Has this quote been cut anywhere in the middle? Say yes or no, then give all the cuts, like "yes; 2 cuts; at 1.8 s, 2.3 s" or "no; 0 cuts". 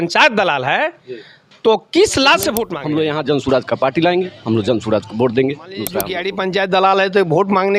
yes; 2 cuts; at 2.7 s, 6.2 s